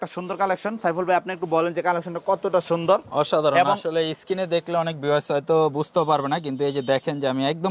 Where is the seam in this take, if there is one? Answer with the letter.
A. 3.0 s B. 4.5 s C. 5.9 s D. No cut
D